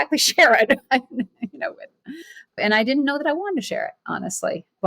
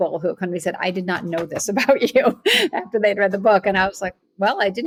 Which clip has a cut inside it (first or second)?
first